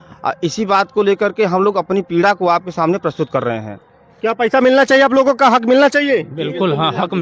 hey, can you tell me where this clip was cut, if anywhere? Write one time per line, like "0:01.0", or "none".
none

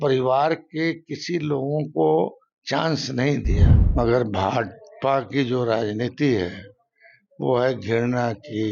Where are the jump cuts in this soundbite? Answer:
0:03.8

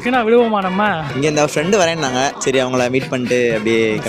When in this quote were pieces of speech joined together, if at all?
0:01.1
0:02.4

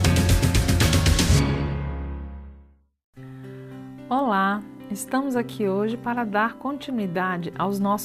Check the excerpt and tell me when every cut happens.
none

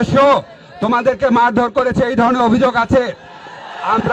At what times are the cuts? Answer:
none

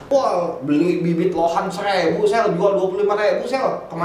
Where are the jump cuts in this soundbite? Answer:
none

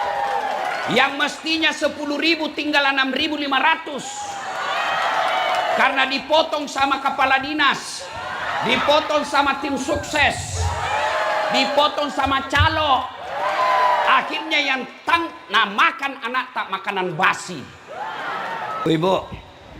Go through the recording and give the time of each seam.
0:18.8

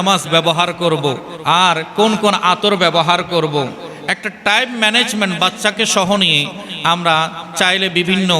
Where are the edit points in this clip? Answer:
0:01.3

